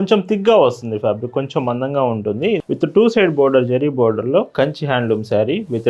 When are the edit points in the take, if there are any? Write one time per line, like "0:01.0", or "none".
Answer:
0:02.6